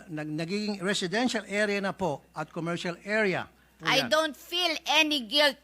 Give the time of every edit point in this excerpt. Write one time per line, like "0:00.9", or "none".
0:03.7

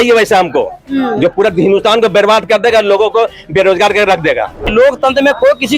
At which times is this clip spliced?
0:04.7

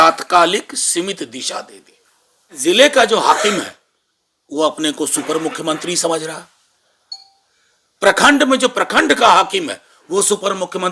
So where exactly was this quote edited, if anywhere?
0:02.6

